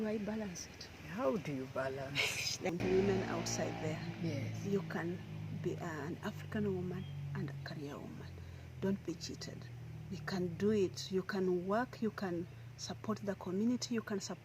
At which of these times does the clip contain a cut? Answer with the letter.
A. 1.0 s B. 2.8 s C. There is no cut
B